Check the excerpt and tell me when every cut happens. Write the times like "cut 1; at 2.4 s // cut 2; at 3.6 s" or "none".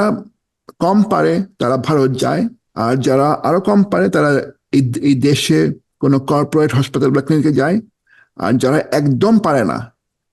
cut 1; at 2.6 s // cut 2; at 5.9 s